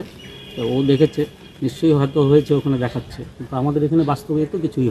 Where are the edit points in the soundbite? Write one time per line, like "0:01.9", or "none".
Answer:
none